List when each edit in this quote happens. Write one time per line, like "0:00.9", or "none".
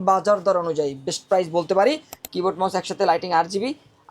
0:02.2